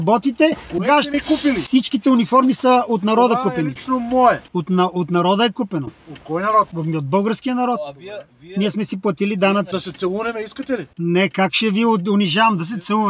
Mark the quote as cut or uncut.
cut